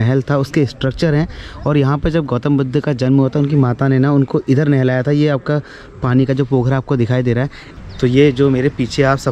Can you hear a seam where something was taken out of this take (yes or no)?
no